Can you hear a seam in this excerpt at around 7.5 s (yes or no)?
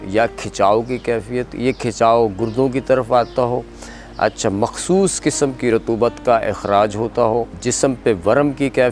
yes